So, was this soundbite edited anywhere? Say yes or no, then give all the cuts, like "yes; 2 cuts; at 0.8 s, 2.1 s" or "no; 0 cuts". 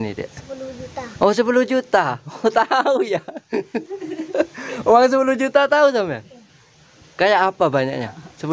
no; 0 cuts